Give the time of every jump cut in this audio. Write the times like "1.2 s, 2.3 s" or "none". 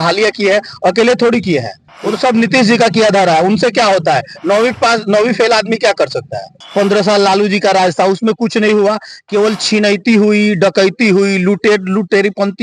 6.6 s